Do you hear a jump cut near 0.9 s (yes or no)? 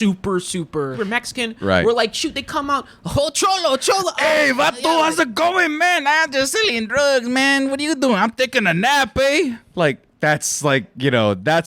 yes